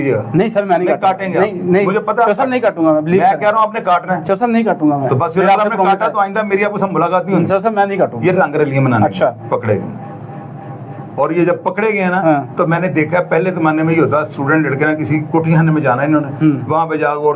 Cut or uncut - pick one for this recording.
uncut